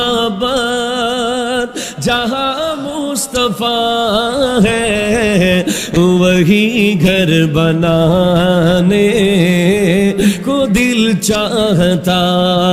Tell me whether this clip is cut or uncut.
uncut